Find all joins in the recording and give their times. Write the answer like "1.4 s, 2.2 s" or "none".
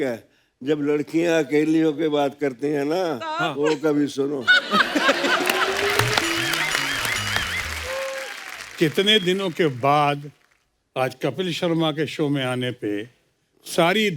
none